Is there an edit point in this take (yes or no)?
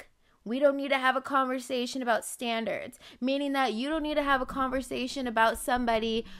no